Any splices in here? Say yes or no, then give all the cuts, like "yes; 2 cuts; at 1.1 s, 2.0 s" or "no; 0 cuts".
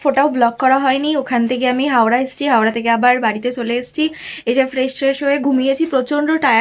no; 0 cuts